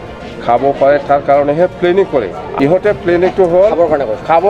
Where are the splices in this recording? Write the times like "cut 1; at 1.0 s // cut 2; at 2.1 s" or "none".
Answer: cut 1; at 2.4 s